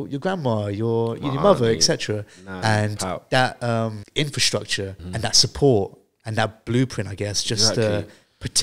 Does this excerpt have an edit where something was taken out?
yes; 2 cuts; at 4.0 s, 5.0 s

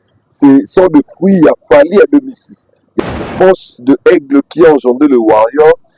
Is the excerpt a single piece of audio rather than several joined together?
no; 1 cut; at 3.0 s

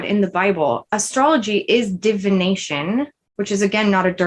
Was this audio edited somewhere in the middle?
yes; 2 cuts; at 0.8 s, 3.2 s

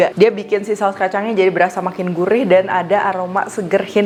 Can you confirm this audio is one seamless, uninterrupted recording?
yes; 0 cuts

